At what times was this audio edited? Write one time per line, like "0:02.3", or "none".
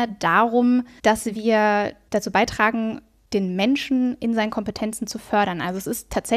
0:00.9
0:03.1